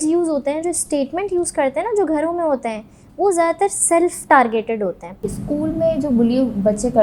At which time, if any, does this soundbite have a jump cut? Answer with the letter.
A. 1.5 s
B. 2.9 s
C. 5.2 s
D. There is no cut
C